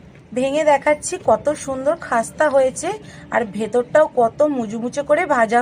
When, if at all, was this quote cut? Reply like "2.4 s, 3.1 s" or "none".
none

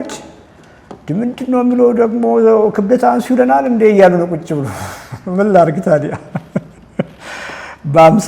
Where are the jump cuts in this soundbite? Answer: none

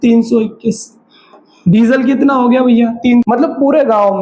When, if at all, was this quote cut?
3.2 s

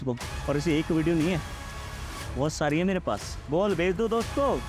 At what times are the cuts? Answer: none

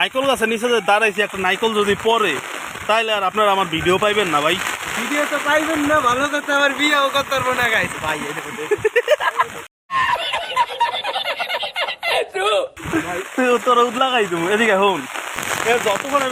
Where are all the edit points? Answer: none

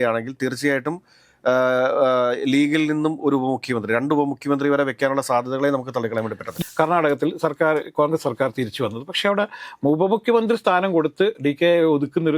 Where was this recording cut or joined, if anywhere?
6.5 s

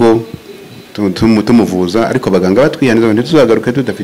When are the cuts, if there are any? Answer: none

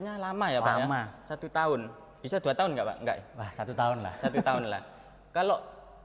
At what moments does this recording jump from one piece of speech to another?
none

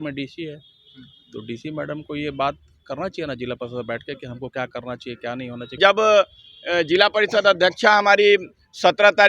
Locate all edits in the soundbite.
5.8 s

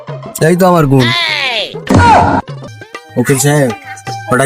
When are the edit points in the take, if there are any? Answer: 2.6 s

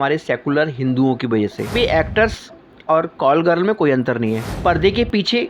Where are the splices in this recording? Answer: 1.7 s, 4.5 s

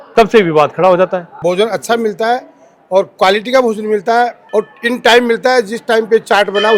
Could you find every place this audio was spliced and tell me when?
1.3 s, 4.4 s

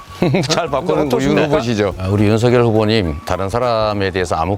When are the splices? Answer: none

